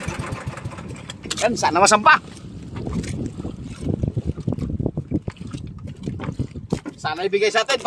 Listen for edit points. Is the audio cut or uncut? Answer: uncut